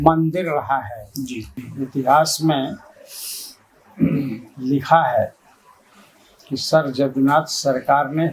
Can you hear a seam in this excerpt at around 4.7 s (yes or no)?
no